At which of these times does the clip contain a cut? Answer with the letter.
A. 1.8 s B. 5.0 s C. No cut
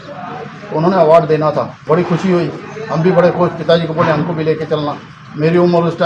A